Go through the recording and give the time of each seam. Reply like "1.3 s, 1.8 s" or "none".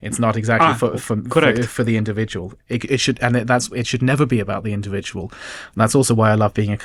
none